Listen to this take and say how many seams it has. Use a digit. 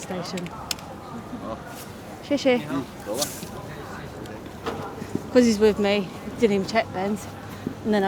0